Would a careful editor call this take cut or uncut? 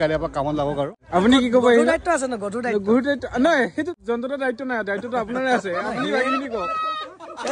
cut